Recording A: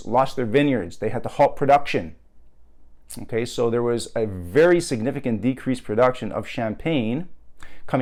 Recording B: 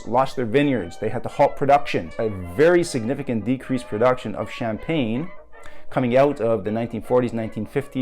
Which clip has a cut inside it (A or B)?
B